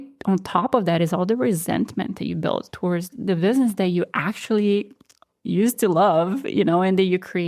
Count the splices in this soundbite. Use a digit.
1